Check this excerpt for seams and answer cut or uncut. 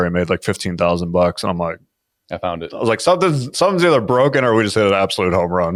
uncut